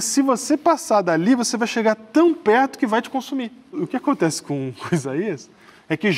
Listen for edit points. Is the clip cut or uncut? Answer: cut